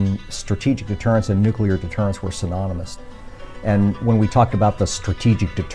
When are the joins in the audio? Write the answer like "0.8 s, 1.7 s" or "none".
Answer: 2.9 s